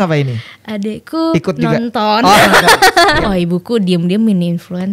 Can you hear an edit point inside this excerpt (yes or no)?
yes